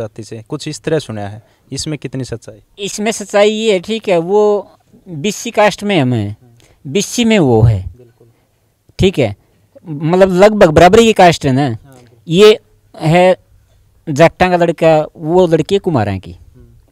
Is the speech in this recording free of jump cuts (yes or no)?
yes